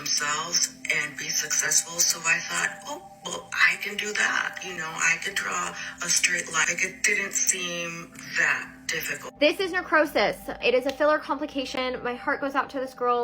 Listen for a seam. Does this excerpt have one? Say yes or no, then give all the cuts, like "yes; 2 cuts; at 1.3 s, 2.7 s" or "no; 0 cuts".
yes; 3 cuts; at 6.7 s, 9.2 s, 10.6 s